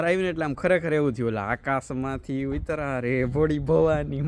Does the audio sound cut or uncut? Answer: uncut